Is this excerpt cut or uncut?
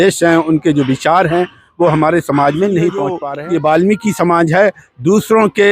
cut